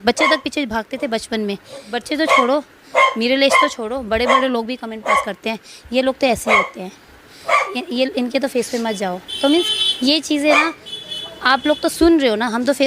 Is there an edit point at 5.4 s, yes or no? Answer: no